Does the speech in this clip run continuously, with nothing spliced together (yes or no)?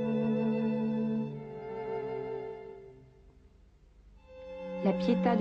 yes